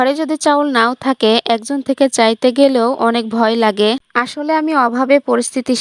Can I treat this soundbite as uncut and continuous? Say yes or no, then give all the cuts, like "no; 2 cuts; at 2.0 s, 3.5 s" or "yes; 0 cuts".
no; 1 cut; at 4.0 s